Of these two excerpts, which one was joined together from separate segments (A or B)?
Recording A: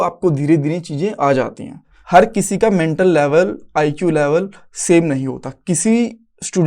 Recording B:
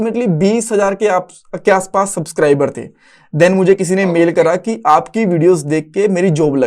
A